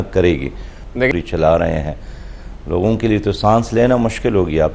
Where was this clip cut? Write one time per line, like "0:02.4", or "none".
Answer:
0:01.1